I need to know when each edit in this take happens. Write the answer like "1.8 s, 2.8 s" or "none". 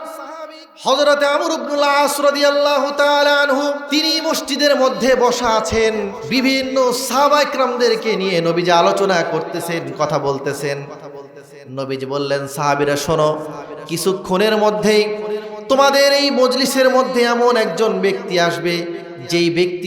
3.8 s, 6.2 s